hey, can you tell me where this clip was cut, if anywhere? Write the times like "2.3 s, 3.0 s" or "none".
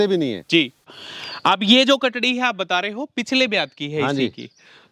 0.9 s